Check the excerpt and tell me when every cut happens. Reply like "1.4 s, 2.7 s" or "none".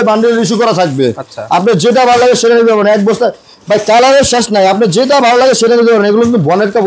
none